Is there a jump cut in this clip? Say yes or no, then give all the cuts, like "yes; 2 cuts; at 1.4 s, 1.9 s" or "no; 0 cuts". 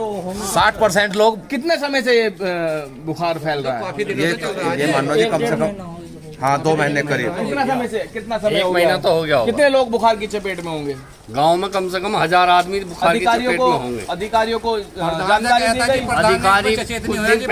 no; 0 cuts